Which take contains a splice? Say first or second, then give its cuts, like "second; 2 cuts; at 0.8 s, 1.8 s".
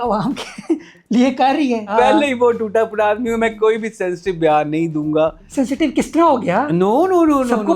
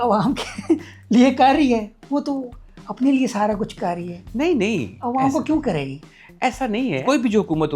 first; 2 cuts; at 1.9 s, 5.4 s